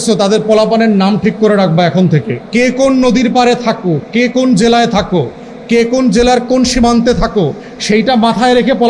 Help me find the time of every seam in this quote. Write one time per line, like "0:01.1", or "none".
0:02.4